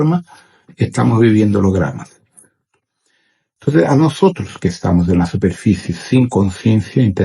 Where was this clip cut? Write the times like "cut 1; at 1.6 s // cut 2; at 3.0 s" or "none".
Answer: cut 1; at 2.7 s